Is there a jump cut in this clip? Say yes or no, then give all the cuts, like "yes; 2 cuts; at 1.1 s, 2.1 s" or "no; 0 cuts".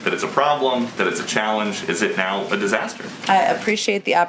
no; 0 cuts